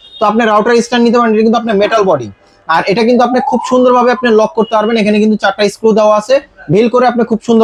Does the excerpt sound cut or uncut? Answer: uncut